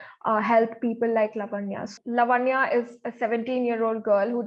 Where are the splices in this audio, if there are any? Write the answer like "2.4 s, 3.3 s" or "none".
1.9 s